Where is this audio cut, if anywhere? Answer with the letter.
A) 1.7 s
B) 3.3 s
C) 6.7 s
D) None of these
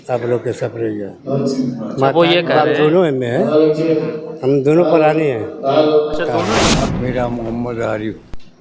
C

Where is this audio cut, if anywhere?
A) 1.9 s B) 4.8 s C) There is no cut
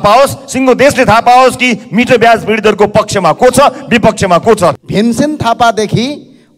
B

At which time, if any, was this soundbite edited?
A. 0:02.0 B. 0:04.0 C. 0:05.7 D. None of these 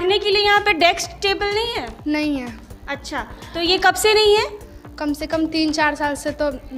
D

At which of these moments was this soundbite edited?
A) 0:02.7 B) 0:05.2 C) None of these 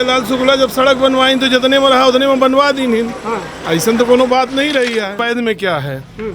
B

